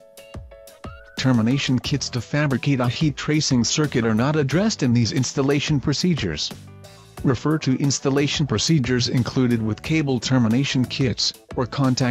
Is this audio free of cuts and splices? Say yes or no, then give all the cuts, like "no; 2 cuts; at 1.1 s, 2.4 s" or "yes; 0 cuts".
no; 1 cut; at 1.2 s